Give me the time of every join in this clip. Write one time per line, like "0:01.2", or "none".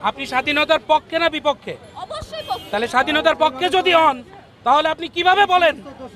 none